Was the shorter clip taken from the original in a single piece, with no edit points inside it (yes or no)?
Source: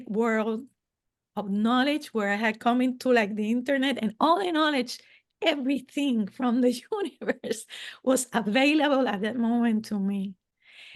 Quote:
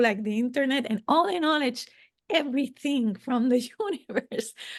yes